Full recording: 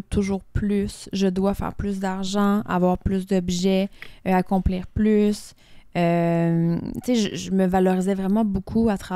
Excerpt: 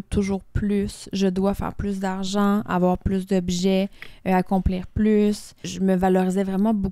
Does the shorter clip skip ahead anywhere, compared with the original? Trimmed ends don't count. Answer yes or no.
yes